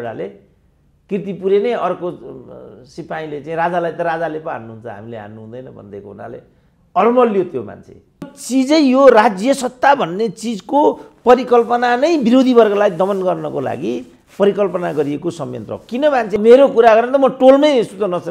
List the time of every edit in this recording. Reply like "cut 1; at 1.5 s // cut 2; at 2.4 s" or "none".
cut 1; at 8.4 s // cut 2; at 16.3 s